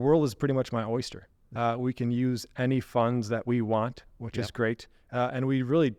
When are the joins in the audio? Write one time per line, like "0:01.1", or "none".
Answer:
0:01.4